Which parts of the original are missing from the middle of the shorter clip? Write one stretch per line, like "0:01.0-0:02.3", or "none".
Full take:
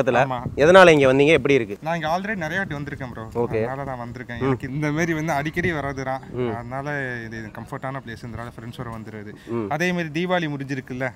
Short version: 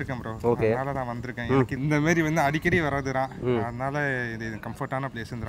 none